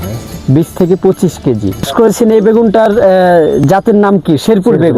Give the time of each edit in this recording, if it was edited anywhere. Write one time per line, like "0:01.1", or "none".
0:01.9